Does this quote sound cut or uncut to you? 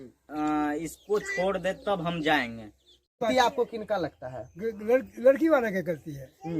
cut